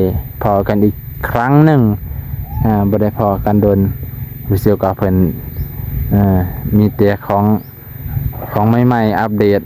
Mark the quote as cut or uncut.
uncut